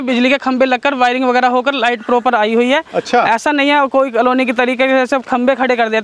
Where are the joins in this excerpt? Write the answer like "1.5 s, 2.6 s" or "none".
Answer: none